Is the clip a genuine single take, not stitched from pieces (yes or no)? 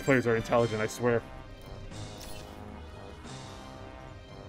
yes